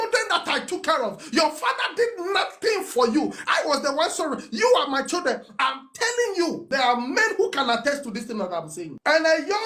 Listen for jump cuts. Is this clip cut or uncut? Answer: uncut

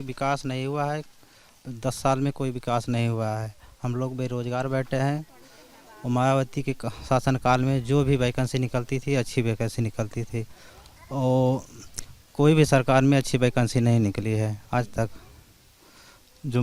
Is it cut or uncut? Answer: uncut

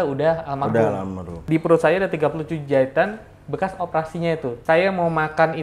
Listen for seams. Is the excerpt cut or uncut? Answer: cut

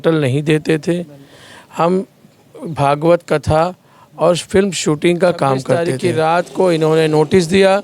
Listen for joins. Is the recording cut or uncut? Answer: cut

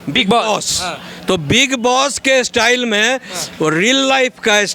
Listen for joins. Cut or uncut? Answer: uncut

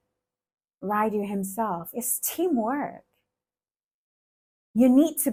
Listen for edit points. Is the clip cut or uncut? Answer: uncut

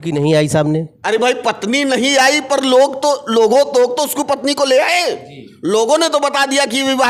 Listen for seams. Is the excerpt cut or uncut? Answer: uncut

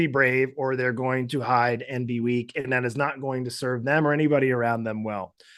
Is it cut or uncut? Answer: uncut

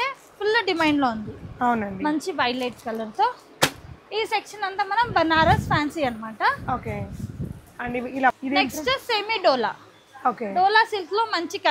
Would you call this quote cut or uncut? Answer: uncut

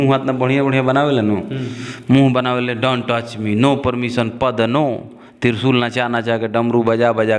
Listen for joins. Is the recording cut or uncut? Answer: uncut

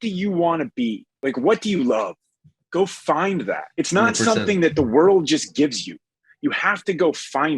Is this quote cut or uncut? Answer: cut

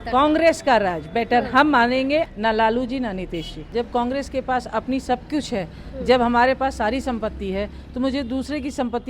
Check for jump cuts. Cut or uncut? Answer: cut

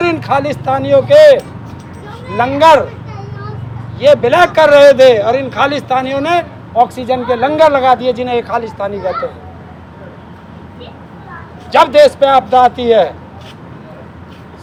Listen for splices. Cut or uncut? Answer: uncut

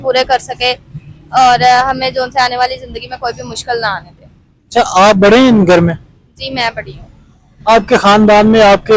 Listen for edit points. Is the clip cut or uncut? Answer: uncut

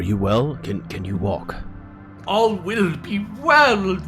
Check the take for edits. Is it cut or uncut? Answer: uncut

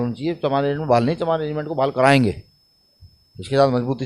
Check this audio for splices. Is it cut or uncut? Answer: uncut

